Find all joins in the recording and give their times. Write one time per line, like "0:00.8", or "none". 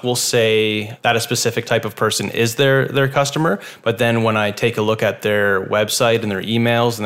0:00.9